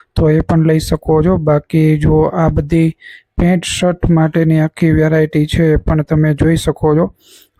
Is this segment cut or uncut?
uncut